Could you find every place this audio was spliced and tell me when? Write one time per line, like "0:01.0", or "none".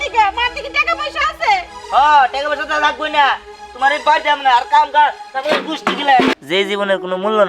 0:06.4